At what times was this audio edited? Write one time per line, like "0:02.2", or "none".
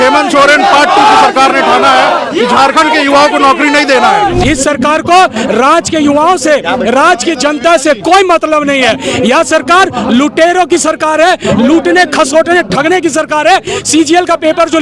0:04.4